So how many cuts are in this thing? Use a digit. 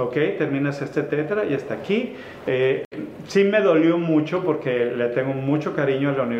0